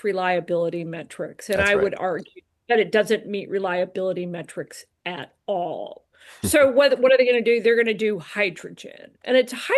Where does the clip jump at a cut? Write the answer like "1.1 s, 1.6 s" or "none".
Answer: none